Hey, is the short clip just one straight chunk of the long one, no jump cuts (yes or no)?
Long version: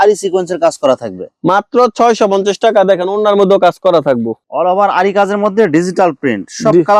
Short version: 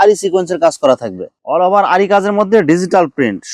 no